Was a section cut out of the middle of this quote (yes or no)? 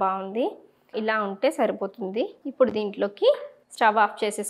no